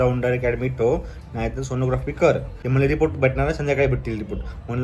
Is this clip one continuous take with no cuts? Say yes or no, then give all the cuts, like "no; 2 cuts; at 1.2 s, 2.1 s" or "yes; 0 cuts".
no; 1 cut; at 2.5 s